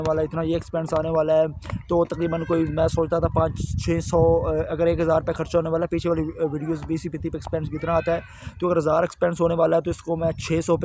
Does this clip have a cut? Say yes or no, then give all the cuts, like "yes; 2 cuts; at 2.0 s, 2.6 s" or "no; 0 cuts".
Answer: no; 0 cuts